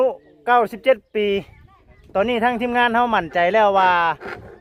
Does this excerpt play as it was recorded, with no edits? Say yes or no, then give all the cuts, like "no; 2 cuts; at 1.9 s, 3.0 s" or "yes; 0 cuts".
yes; 0 cuts